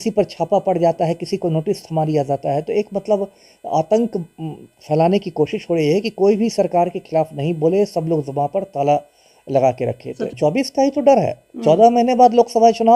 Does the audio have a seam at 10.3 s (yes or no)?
yes